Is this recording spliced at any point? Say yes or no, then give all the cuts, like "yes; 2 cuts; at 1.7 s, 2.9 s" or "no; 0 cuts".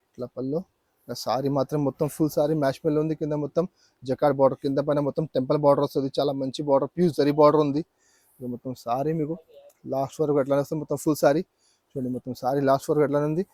no; 0 cuts